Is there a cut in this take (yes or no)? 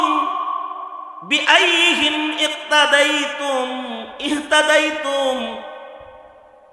no